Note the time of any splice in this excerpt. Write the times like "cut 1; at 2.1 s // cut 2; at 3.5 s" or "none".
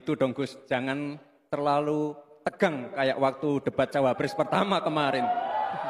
none